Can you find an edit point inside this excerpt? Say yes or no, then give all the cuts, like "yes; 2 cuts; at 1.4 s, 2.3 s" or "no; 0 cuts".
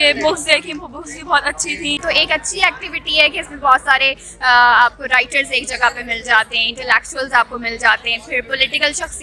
yes; 1 cut; at 2.0 s